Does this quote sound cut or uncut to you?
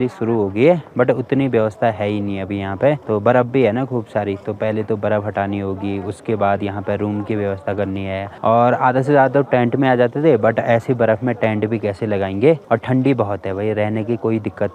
uncut